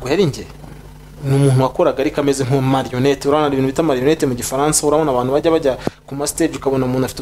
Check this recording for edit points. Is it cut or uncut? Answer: uncut